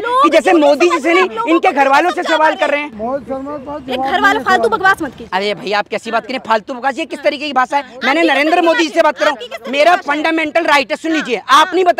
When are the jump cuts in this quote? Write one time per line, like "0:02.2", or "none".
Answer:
none